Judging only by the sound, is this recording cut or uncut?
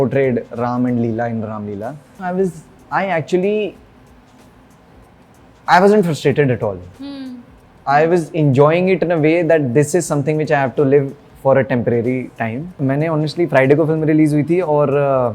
cut